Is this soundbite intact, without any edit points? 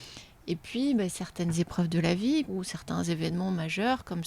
no; 1 cut; at 2.5 s

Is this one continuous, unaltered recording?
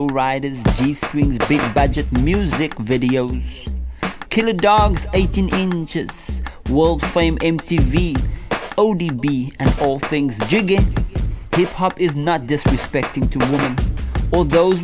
yes; 0 cuts

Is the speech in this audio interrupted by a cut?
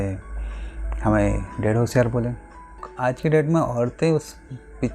yes; 1 cut; at 2.8 s

